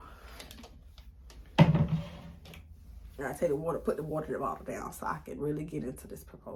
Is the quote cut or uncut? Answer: uncut